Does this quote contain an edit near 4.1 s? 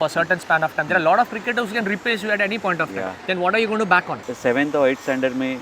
yes; 1 cut; at 4.1 s

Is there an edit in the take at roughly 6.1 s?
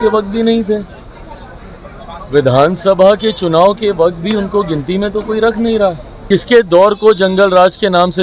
yes; 1 cut; at 6.1 s

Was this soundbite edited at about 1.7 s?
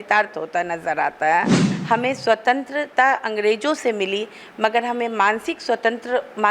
yes; 1 cut; at 1.7 s

